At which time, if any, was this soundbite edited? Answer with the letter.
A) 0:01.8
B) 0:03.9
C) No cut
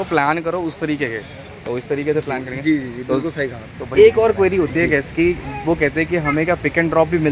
B